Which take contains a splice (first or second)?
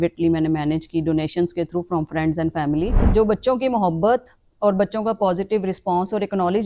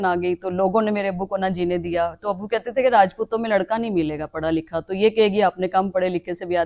first